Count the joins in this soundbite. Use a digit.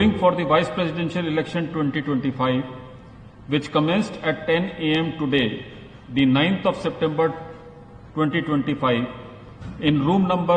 0